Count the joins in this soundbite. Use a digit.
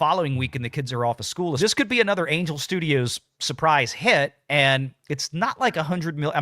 1